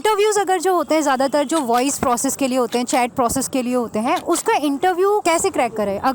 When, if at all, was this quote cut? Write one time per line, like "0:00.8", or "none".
none